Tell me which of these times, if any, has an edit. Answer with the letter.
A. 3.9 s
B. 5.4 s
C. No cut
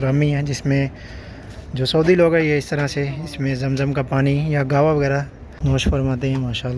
B